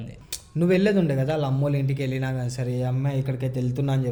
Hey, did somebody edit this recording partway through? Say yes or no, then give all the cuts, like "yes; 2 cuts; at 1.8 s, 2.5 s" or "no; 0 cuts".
no; 0 cuts